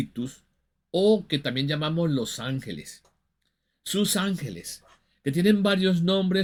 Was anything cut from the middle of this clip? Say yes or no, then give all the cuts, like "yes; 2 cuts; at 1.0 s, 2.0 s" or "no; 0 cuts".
no; 0 cuts